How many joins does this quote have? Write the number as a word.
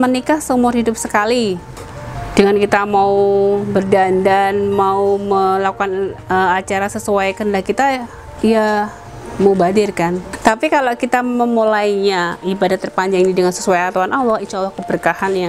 one